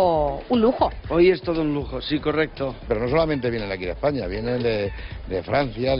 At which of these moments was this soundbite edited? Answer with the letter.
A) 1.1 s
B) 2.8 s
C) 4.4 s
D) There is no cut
B